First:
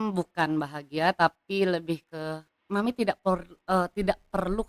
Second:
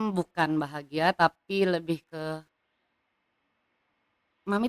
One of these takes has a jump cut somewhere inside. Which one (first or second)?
first